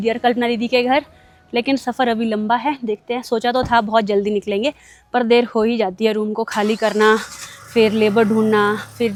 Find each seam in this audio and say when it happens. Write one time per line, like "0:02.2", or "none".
none